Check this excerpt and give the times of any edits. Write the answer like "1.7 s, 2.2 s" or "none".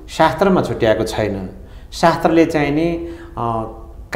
none